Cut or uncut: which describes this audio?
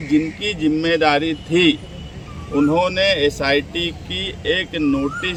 uncut